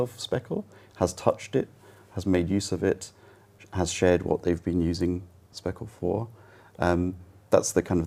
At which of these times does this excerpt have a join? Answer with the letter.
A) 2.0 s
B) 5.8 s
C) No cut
C